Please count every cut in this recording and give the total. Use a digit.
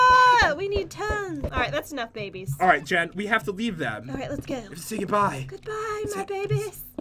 1